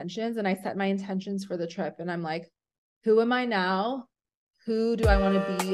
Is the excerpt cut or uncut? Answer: uncut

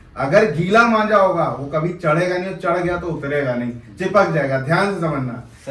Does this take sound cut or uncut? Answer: uncut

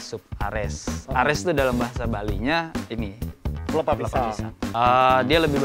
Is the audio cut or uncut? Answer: cut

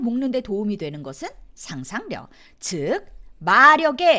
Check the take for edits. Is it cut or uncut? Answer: uncut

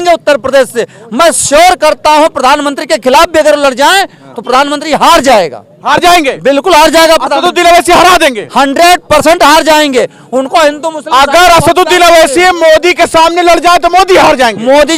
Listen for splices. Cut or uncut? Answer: uncut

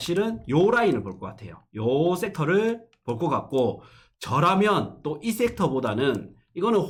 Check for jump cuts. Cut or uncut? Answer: uncut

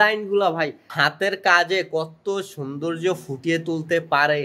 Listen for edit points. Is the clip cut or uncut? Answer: uncut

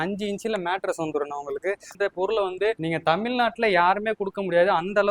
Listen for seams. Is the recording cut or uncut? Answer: cut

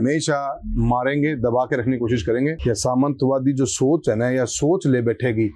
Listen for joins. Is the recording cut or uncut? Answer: cut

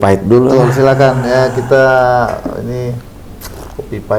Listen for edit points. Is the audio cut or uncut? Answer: uncut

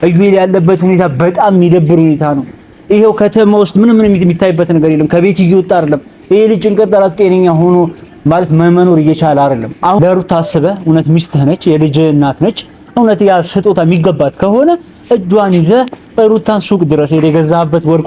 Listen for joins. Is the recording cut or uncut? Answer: cut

